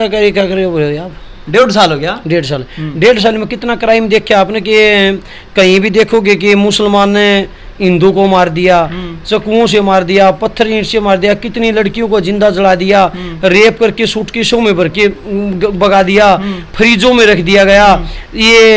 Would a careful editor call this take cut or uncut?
uncut